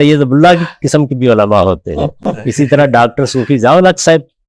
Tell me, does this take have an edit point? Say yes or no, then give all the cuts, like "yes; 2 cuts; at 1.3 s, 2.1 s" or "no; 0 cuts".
no; 0 cuts